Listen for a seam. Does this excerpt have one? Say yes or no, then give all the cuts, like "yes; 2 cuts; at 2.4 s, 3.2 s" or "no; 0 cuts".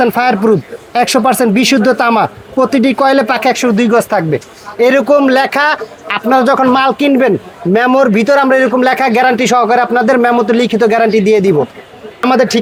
no; 0 cuts